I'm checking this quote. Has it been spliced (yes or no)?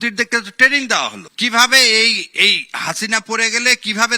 yes